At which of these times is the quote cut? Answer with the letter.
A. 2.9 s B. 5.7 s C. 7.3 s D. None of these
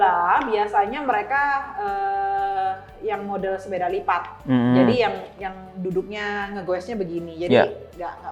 D